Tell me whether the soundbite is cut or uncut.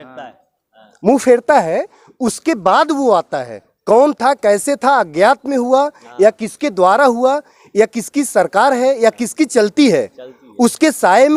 uncut